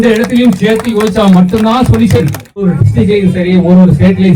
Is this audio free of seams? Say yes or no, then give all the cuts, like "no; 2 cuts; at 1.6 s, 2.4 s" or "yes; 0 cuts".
no; 1 cut; at 2.7 s